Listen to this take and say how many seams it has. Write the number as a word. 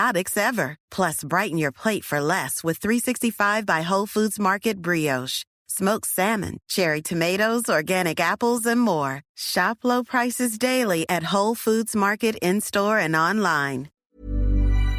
one